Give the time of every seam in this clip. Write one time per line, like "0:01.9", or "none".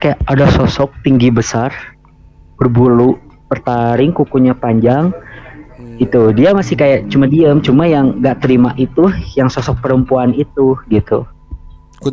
none